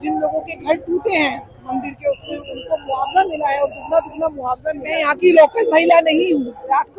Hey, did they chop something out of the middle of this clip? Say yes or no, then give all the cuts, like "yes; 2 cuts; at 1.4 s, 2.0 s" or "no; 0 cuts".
yes; 1 cut; at 4.9 s